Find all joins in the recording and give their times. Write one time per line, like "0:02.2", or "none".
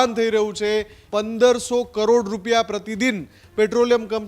0:01.0